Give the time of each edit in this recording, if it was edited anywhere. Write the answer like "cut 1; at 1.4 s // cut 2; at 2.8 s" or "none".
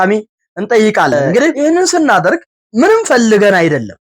cut 1; at 1.6 s // cut 2; at 2.6 s